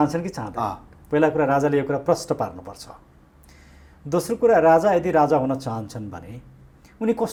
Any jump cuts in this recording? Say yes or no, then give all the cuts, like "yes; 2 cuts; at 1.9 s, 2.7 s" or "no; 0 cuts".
no; 0 cuts